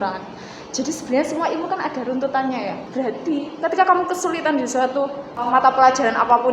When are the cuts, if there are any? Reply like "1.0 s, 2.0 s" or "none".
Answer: 2.8 s, 5.5 s